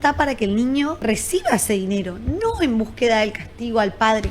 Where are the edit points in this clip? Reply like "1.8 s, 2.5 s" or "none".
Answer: 1.0 s